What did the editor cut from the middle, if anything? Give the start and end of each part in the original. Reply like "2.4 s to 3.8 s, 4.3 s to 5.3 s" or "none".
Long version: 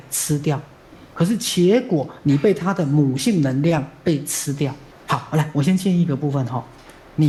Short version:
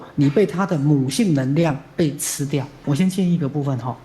4.9 s to 5.5 s